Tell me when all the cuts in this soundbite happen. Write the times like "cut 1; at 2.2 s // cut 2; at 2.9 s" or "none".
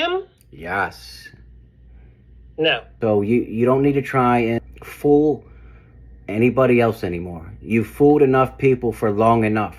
cut 1; at 2.9 s // cut 2; at 4.6 s